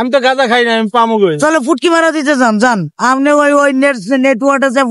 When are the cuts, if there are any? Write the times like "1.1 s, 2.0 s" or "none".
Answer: none